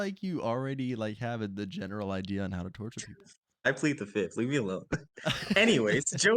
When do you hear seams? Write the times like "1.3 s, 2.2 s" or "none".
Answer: 3.6 s